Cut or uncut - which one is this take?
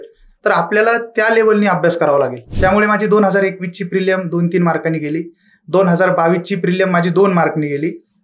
cut